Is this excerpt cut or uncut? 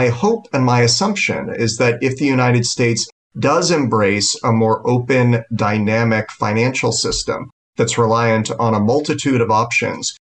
uncut